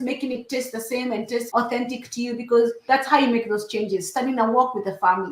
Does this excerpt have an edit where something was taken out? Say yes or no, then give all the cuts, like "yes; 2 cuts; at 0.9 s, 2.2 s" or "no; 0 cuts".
yes; 2 cuts; at 1.5 s, 2.8 s